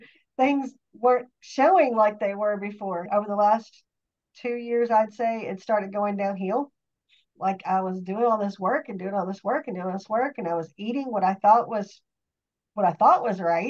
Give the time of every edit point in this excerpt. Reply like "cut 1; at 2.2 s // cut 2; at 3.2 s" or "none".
none